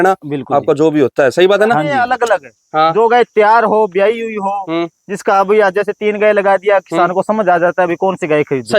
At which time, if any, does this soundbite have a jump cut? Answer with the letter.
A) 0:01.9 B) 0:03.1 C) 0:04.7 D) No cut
A